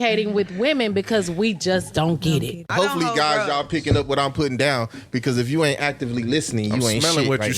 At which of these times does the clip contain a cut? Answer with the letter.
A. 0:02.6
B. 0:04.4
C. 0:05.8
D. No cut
A